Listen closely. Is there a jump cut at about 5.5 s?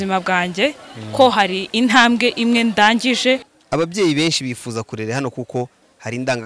no; 1 cut; at 3.5 s

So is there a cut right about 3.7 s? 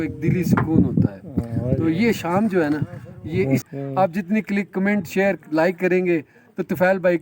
yes; 1 cut; at 3.7 s

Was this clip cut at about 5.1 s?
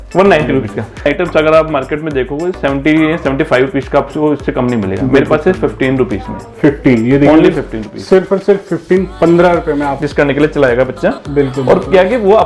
no; 2 cuts; at 1.1 s, 10.0 s

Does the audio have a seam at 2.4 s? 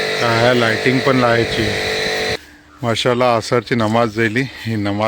yes; 1 cut; at 2.4 s

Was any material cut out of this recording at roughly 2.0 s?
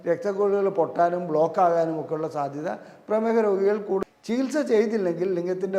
no; 1 cut; at 4.0 s

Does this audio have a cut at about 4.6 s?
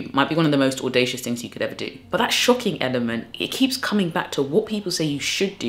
no; 1 cut; at 2.1 s

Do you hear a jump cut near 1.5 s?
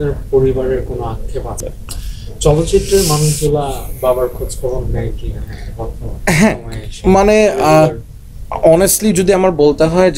yes; 1 cut; at 1.5 s

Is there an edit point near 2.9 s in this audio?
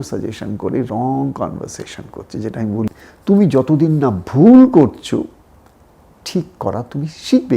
yes; 1 cut; at 2.9 s

